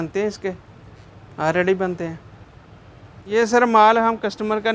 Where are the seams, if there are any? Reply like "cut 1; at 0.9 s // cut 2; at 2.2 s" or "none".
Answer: cut 1; at 3.2 s